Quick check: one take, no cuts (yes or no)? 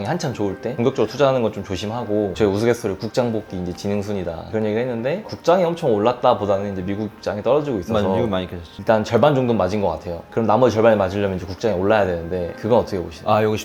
no